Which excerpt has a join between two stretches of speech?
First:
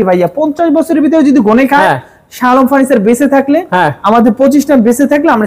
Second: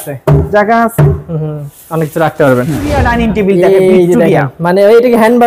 second; 1 cut; at 3.0 s

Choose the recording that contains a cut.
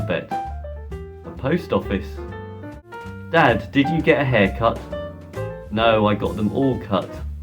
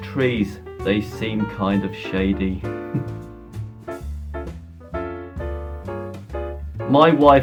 first; 1 cut; at 2.8 s

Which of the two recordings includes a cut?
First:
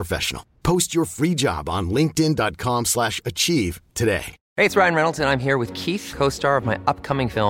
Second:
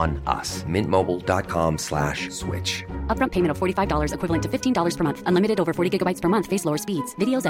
first; 1 cut; at 4.4 s

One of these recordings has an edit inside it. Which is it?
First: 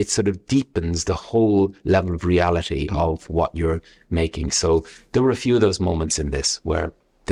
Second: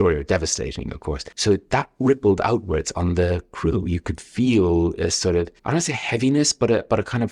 second; 2 cuts; at 1.3 s, 5.6 s

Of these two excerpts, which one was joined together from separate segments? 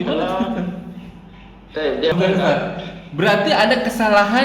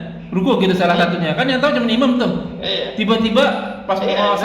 first; 1 cut; at 2.1 s

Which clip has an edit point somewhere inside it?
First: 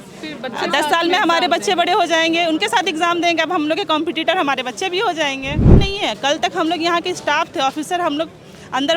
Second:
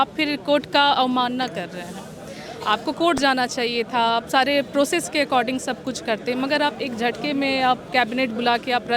first; 1 cut; at 5.6 s

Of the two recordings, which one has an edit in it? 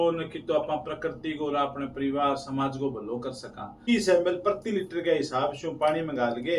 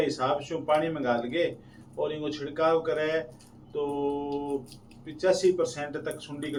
first; 1 cut; at 3.8 s

